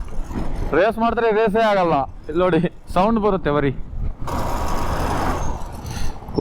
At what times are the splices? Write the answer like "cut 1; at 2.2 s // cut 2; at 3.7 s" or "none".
cut 1; at 4.3 s

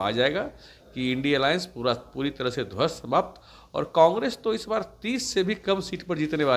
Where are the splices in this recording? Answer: none

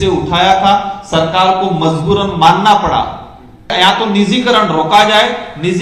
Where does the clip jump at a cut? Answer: cut 1; at 3.7 s

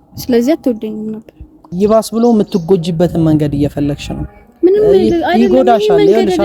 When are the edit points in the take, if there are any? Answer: cut 1; at 1.7 s

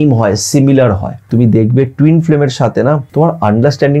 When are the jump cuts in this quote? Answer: cut 1; at 1.3 s // cut 2; at 3.1 s

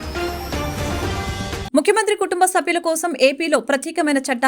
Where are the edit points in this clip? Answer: cut 1; at 1.6 s

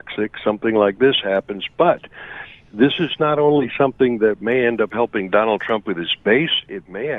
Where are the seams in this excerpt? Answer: none

